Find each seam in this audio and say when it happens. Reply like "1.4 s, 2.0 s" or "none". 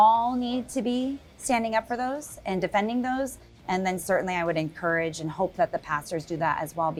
none

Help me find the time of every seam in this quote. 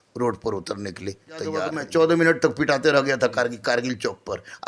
1.8 s

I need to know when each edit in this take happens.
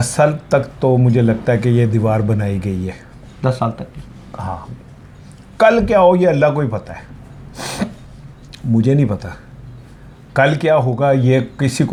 none

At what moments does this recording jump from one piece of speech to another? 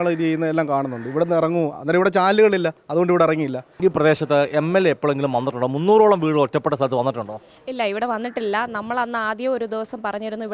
3.7 s

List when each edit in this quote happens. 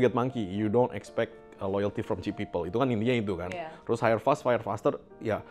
none

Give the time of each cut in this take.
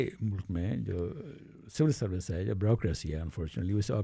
none

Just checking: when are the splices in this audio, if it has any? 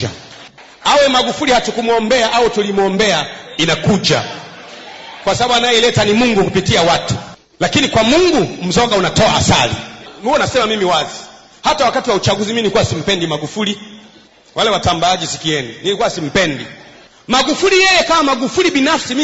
none

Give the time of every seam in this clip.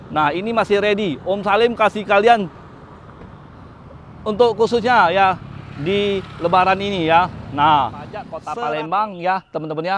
8.4 s

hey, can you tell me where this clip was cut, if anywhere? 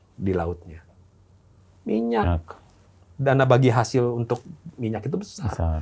none

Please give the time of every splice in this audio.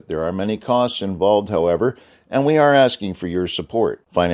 none

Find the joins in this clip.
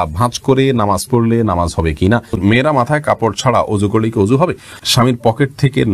2.4 s, 4.8 s

